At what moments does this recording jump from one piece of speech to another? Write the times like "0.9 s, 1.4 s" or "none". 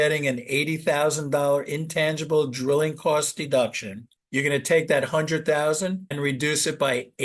4.1 s

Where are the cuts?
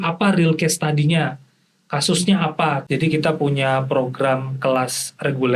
2.8 s

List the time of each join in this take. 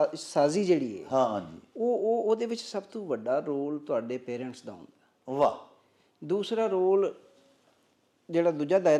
none

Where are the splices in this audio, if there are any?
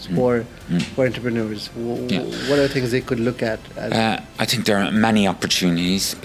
none

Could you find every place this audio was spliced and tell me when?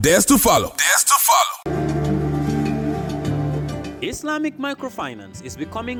none

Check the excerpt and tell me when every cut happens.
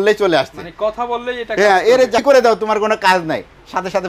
2.2 s

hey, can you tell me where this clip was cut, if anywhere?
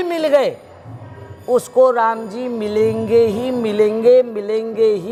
none

